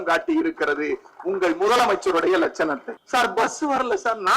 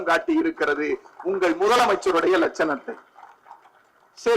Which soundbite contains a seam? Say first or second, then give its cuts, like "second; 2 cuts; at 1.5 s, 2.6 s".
first; 1 cut; at 2.9 s